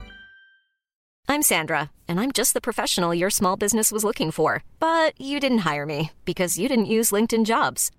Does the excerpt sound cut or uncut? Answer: cut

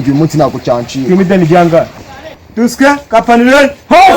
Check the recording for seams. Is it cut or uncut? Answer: cut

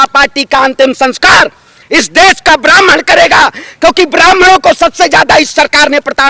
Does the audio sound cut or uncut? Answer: uncut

